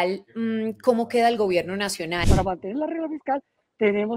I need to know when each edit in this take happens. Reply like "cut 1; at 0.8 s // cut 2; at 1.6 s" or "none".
cut 1; at 2.2 s